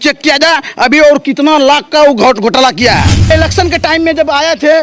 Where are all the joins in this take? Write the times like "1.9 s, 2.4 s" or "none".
3.3 s